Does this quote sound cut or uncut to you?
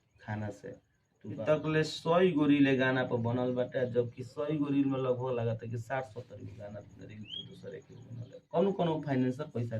cut